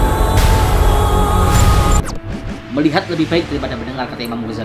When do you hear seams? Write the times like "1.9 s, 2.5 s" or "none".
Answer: 2.5 s